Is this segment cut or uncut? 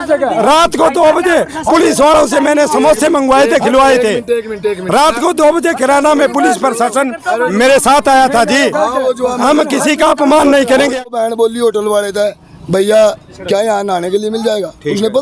cut